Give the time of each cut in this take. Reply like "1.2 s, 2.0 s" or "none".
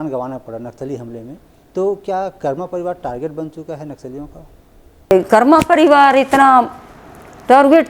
5.1 s